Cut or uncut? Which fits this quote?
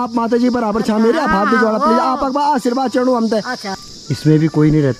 cut